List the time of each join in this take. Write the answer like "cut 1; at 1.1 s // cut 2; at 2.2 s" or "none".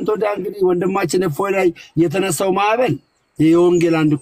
none

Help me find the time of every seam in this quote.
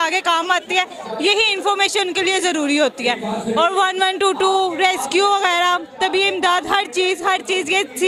none

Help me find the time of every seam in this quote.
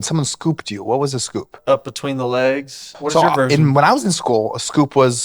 cut 1; at 1.5 s // cut 2; at 2.9 s

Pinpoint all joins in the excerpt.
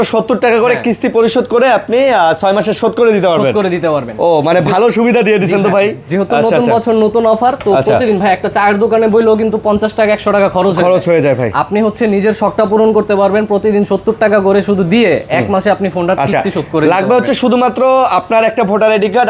none

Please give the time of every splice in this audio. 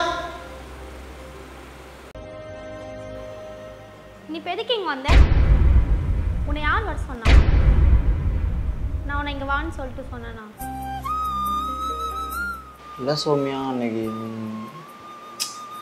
cut 1; at 2.1 s

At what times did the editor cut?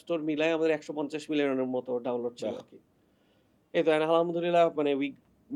none

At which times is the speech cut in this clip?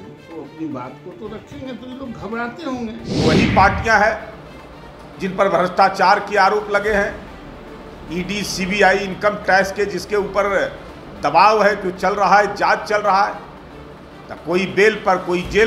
cut 1; at 3.1 s

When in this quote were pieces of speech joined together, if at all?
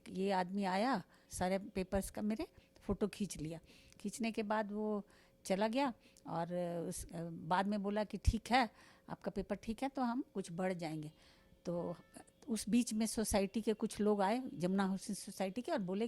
cut 1; at 1.2 s

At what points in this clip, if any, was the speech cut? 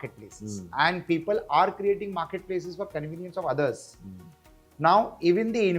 none

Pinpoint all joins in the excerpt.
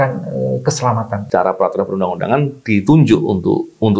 cut 1; at 1.2 s

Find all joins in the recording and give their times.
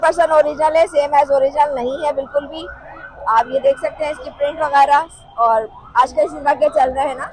none

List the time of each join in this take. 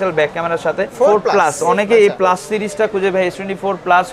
cut 1; at 0.9 s

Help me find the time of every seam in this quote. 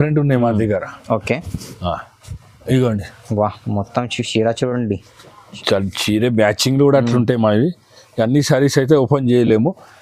none

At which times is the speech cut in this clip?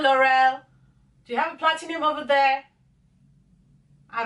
none

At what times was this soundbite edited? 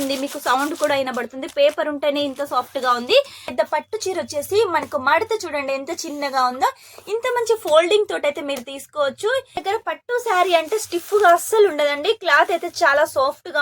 cut 1; at 3.5 s // cut 2; at 9.6 s

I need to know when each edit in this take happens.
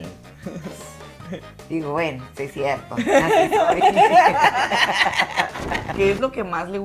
cut 1; at 5.9 s

